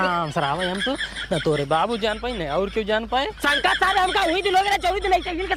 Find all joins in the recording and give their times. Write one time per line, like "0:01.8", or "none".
0:03.4